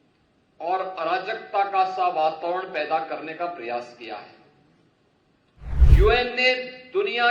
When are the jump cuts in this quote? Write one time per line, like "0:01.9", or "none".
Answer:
0:05.9